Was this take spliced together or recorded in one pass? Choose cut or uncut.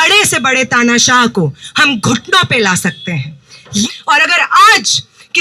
cut